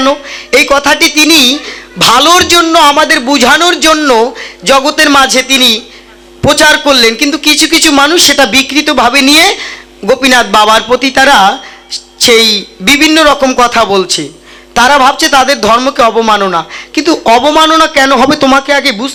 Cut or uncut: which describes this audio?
uncut